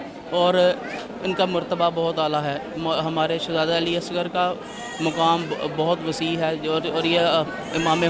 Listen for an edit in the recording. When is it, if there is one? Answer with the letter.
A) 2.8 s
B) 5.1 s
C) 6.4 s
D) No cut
D